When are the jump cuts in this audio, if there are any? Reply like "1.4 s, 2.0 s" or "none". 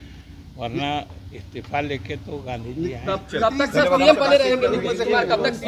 none

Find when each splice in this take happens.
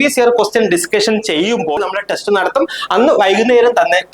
1.8 s

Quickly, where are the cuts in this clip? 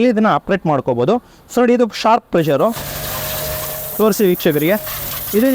none

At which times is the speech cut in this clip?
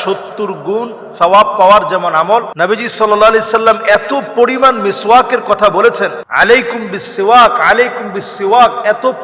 2.5 s, 6.2 s

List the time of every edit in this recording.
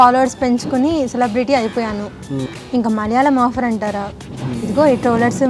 2.3 s

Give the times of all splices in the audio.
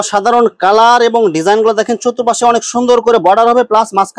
none

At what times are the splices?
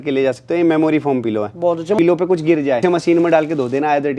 2.0 s, 2.8 s

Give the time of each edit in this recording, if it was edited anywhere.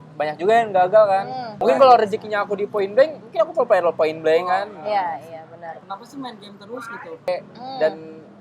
1.5 s, 5.8 s, 7.3 s

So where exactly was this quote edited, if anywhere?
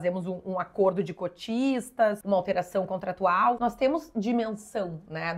2.2 s, 3.6 s

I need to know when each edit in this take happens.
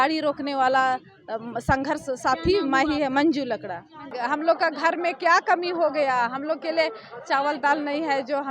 4.1 s

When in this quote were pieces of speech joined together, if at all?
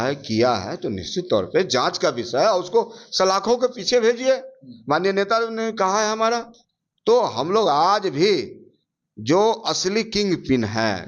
none

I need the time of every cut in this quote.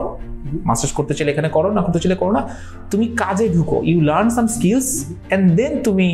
none

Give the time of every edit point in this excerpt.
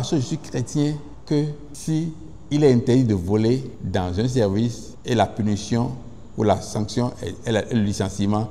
1.1 s, 1.7 s, 3.8 s, 4.9 s

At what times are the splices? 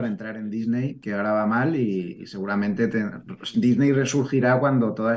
none

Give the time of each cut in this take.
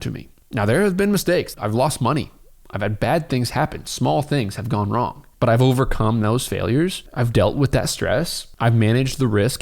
1.5 s, 7.0 s, 8.4 s

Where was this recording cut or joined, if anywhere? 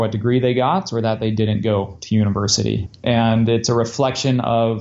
2.9 s

